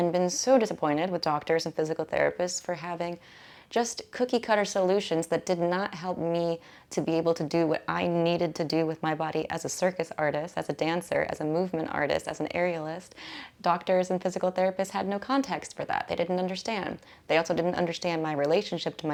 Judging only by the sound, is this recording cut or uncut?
uncut